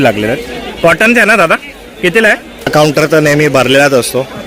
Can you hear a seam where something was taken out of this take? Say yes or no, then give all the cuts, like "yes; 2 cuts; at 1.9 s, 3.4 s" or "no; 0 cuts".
yes; 1 cut; at 2.7 s